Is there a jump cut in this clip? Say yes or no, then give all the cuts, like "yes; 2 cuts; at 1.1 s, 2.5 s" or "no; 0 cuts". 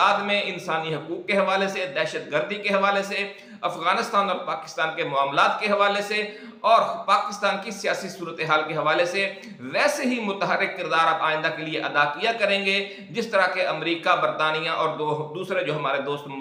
no; 0 cuts